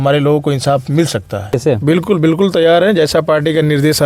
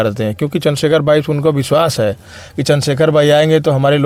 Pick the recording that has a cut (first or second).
first